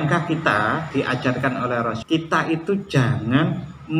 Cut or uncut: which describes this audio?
cut